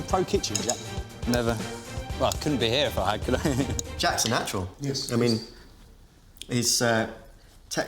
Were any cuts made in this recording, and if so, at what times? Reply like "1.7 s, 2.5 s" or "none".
3.9 s